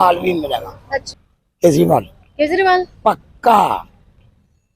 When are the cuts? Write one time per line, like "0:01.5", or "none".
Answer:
0:01.1